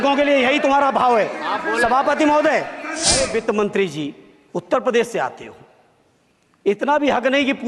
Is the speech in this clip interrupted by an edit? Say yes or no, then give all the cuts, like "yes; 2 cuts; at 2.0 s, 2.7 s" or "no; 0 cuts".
yes; 1 cut; at 3.2 s